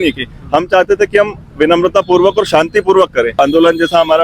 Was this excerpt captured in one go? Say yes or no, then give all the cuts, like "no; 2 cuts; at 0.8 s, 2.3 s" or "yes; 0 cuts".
no; 1 cut; at 3.3 s